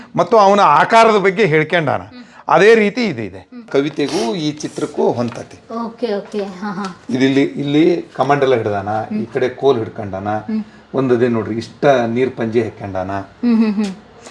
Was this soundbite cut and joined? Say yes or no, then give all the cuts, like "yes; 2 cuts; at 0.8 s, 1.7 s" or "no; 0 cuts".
yes; 1 cut; at 3.7 s